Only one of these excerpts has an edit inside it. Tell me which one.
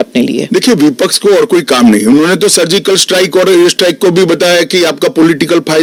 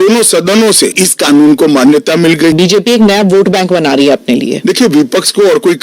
second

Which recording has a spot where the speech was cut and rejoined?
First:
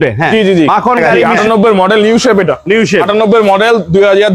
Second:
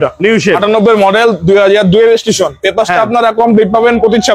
first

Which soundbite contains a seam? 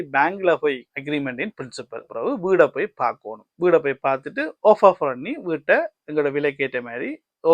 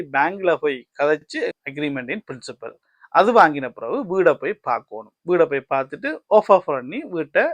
first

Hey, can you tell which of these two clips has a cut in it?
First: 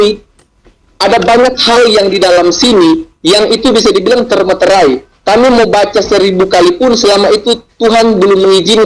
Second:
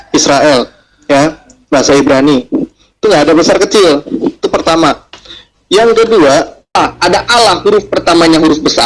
second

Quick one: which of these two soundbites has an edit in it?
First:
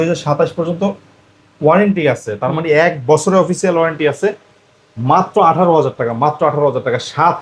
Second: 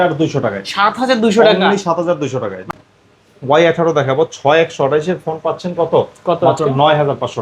second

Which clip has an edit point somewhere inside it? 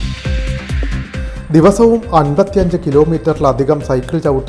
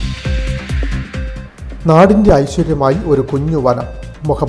second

